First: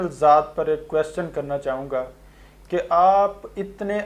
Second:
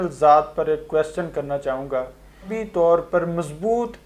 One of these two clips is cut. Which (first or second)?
second